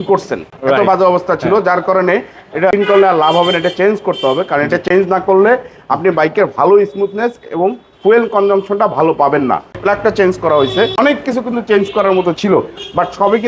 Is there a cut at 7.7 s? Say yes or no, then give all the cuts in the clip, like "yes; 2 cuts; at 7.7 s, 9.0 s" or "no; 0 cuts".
no; 3 cuts; at 2.7 s, 9.8 s, 11.0 s